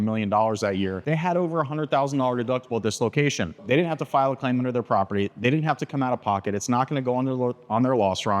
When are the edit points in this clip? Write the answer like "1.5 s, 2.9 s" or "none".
1.0 s, 3.6 s